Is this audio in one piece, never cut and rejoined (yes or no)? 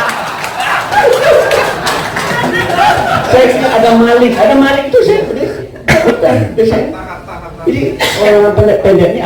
yes